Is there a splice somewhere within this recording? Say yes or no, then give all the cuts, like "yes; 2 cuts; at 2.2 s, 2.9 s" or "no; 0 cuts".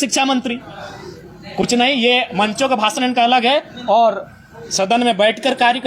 no; 0 cuts